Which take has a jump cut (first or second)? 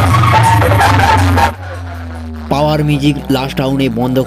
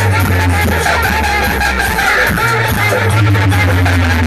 first